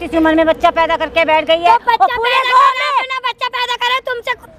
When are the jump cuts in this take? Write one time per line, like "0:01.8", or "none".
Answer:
none